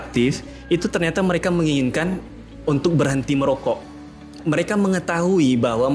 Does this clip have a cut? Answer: yes; 1 cut; at 4.4 s

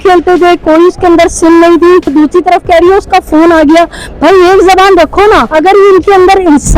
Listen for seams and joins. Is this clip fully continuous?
no; 2 cuts; at 2.1 s, 5.5 s

